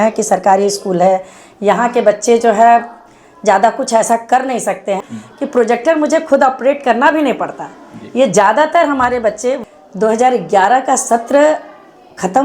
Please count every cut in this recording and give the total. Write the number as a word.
two